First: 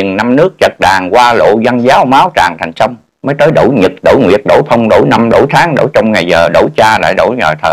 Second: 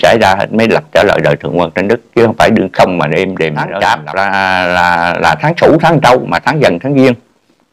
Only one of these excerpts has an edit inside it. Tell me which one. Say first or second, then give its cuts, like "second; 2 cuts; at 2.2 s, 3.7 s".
second; 1 cut; at 3.7 s